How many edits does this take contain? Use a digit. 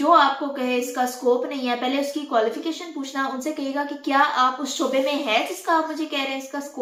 0